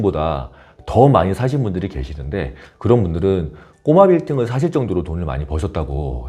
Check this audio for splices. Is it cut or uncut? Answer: uncut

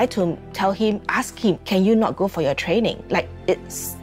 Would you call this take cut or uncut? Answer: cut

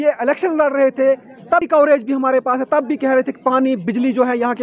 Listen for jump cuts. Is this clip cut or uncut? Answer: cut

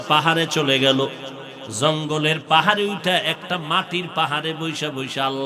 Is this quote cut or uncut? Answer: uncut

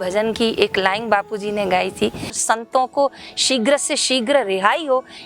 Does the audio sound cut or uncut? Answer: cut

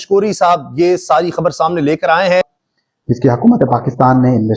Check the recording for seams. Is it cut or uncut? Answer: cut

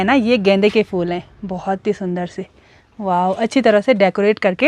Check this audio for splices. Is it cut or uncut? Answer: uncut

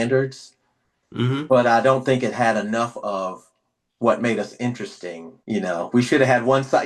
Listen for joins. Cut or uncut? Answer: uncut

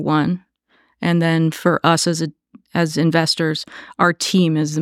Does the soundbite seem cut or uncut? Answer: uncut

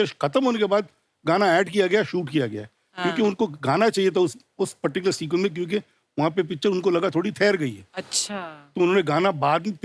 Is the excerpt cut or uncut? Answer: uncut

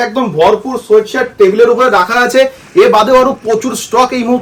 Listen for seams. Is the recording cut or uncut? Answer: uncut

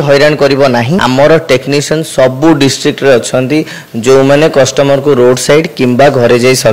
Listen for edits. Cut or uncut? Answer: cut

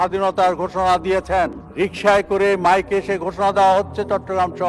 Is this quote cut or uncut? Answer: uncut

